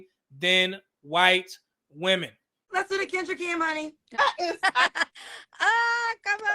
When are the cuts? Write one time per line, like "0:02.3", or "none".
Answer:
0:02.7
0:04.2